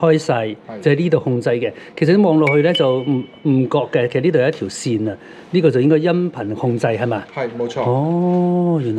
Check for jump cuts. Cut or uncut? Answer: uncut